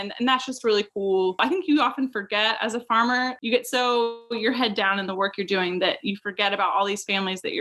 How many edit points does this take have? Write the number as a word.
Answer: two